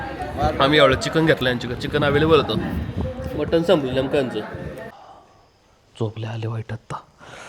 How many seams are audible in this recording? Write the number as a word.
one